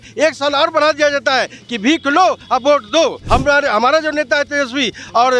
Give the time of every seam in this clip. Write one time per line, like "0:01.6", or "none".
0:03.2